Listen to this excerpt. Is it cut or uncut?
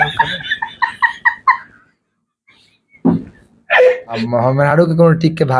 cut